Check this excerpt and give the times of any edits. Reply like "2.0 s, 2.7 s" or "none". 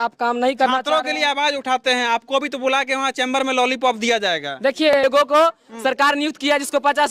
5.0 s